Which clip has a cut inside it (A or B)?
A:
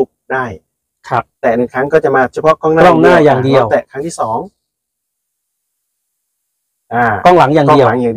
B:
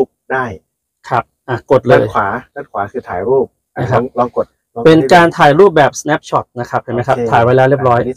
A